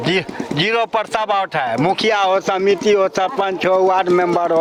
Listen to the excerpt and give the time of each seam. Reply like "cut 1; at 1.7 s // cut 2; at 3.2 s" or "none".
none